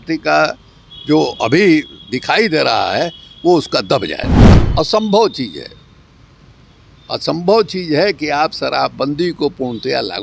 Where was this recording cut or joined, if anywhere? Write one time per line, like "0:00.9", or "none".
0:04.6